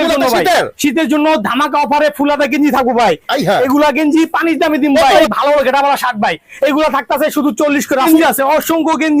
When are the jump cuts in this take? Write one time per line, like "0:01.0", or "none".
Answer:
0:05.2
0:08.1